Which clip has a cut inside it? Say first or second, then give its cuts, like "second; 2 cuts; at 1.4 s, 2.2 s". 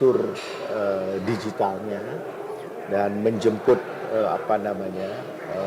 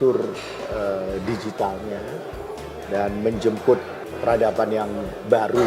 second; 1 cut; at 4.0 s